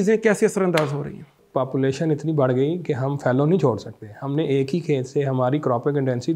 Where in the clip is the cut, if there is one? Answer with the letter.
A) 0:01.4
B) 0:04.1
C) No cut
A